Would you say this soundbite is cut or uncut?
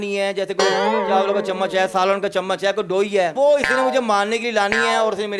cut